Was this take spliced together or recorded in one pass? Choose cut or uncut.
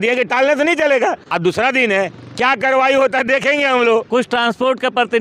cut